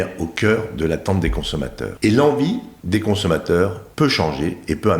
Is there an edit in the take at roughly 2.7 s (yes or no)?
yes